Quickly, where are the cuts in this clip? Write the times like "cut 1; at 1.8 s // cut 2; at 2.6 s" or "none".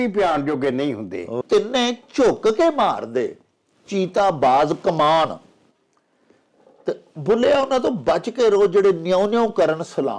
cut 1; at 1.4 s